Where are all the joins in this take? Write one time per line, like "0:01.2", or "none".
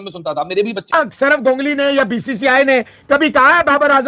0:00.9